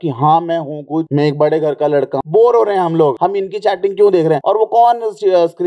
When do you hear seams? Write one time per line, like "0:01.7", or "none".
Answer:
0:01.1
0:02.1
0:03.2
0:04.4